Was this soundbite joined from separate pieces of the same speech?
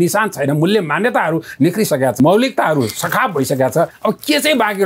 yes; 2 cuts; at 2.2 s, 3.9 s

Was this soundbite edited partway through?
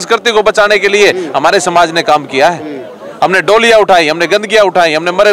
no; 0 cuts

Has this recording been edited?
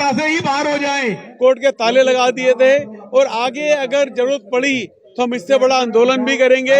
yes; 1 cut; at 1.2 s

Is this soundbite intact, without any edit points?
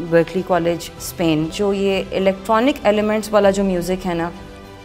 no; 1 cut; at 1.5 s

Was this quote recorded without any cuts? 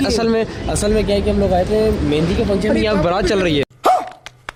yes; 0 cuts

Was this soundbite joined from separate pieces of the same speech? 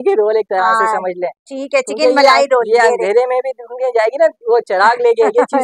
no; 0 cuts

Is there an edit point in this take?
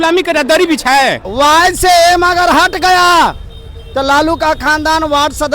yes; 1 cut; at 1.3 s

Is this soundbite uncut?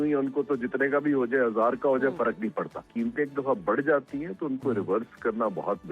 no; 1 cut; at 2.9 s

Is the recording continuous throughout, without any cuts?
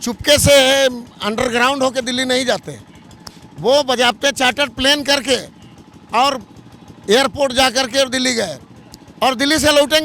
yes; 0 cuts

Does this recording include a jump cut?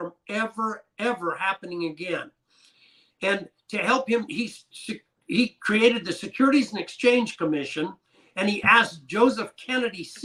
no; 0 cuts

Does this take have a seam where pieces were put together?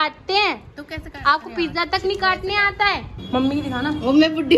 yes; 1 cut; at 3.1 s

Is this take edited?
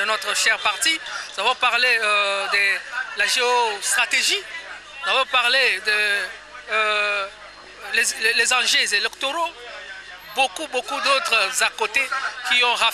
no; 0 cuts

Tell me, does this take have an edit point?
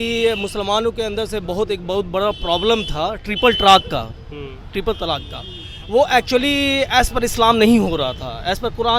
no; 0 cuts

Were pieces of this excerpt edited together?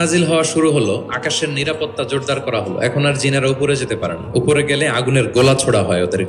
no; 0 cuts

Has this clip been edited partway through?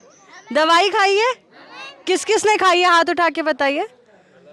no; 0 cuts

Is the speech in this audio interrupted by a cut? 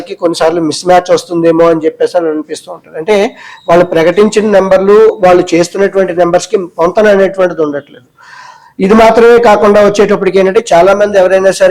no; 0 cuts

